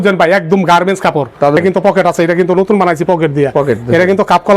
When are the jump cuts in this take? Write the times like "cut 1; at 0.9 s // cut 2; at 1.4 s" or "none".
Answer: cut 1; at 1.6 s